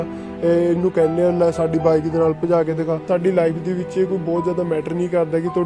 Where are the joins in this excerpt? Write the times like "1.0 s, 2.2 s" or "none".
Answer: 3.1 s